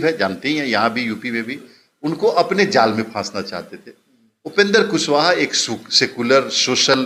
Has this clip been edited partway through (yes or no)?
no